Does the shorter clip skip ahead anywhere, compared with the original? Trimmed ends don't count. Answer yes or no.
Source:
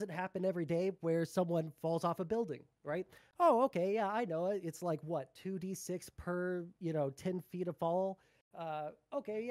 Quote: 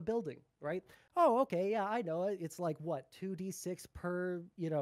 no